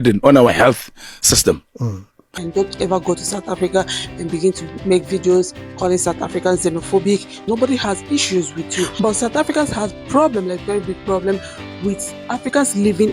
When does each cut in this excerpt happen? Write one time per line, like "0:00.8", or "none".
0:02.4
0:07.4